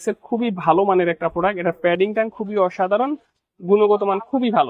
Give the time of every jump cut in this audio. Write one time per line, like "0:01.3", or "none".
none